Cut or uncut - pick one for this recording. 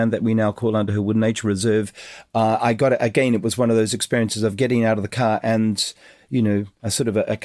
uncut